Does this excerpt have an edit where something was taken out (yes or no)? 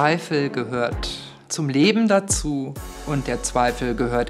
no